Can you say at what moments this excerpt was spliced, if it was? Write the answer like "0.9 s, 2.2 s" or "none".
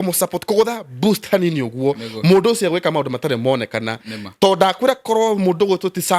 none